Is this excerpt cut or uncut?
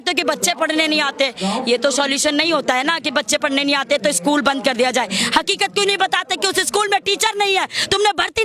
uncut